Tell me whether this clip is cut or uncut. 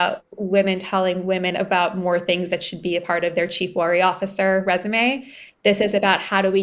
uncut